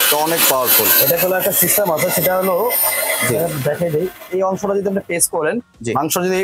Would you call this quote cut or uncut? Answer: uncut